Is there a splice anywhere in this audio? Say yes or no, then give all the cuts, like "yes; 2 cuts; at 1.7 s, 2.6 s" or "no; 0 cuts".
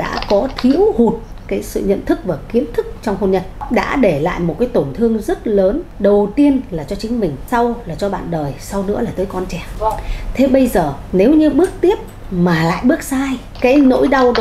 yes; 6 cuts; at 3.6 s, 5.9 s, 7.4 s, 9.6 s, 11.0 s, 13.4 s